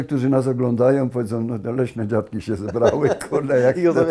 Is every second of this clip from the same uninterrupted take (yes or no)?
yes